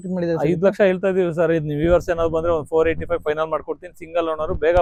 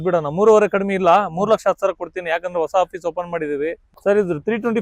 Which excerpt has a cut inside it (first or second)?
second